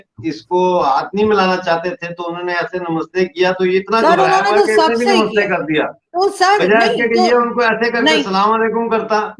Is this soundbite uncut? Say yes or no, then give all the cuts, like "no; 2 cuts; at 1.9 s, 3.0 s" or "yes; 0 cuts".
yes; 0 cuts